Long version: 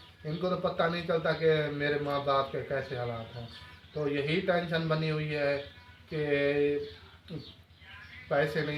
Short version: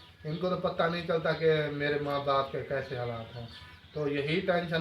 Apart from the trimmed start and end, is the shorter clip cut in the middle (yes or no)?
no